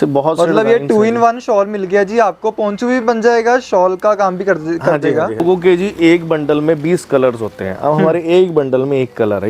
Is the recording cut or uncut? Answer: cut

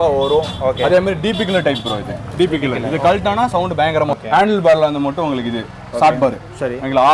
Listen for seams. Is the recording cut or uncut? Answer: cut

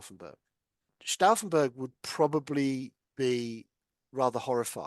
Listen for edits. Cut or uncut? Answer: cut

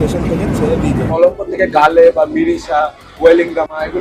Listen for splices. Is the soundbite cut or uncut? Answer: cut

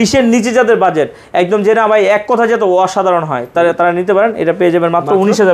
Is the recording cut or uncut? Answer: uncut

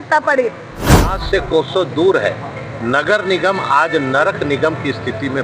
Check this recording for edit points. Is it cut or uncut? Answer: cut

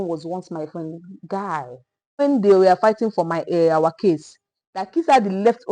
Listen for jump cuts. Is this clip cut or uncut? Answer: cut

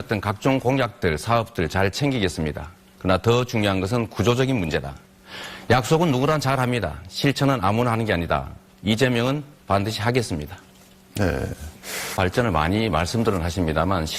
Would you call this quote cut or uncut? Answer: cut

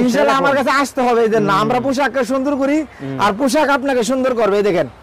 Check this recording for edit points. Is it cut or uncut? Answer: uncut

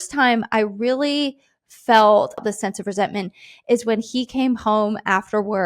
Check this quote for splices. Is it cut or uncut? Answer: cut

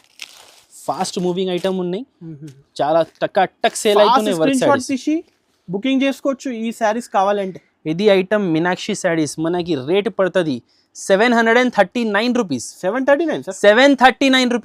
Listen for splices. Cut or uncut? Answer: uncut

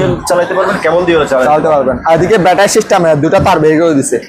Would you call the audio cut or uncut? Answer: uncut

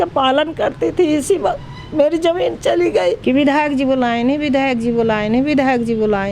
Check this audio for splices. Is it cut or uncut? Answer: cut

